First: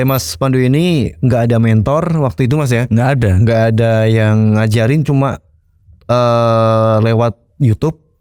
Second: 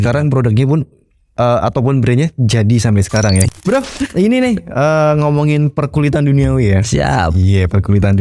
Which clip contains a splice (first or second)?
second